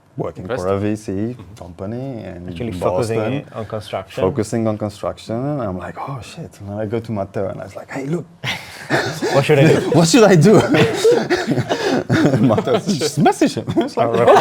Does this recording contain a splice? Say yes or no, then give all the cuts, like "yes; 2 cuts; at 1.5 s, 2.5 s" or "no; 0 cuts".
no; 0 cuts